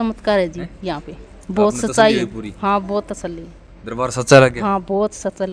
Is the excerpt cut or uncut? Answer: uncut